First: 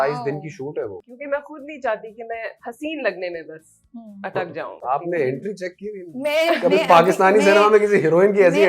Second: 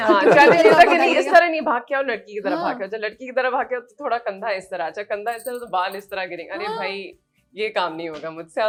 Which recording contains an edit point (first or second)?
first